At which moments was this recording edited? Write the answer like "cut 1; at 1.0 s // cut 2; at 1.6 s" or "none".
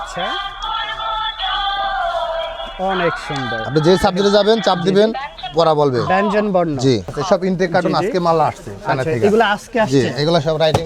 cut 1; at 7.1 s